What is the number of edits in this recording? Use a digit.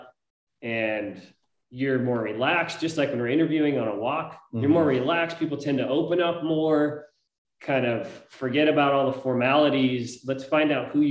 0